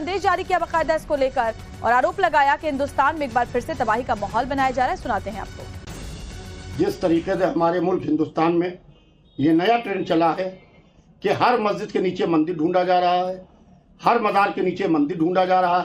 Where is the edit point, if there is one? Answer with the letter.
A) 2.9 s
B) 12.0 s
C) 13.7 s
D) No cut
A